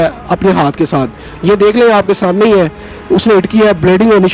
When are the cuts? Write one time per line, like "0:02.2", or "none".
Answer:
none